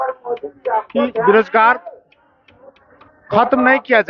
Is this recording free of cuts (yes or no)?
yes